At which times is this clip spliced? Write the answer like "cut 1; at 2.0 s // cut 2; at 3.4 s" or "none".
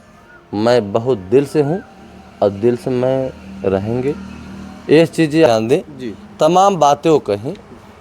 cut 1; at 5.5 s